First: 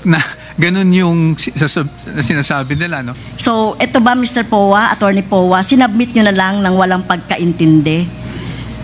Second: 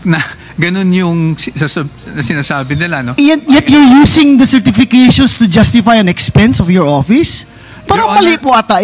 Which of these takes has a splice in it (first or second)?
first